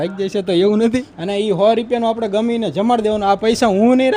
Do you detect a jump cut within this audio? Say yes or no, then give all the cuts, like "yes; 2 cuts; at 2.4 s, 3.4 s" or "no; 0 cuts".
yes; 1 cut; at 1.2 s